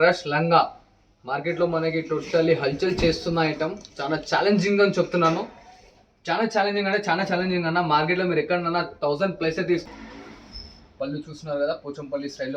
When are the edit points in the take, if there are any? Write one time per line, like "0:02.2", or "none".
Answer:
0:09.9